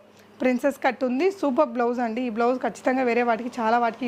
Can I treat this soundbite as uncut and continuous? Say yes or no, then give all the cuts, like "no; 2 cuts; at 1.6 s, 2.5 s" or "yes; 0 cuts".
yes; 0 cuts